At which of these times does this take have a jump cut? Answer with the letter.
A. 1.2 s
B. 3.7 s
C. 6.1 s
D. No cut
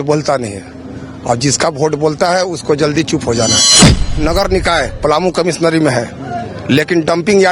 B